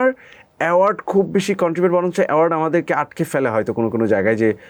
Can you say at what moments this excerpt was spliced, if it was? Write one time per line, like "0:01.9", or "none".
none